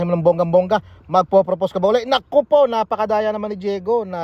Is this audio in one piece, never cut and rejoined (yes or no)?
yes